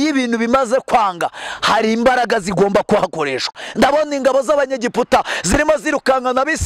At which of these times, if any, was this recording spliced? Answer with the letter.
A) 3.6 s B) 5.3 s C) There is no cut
A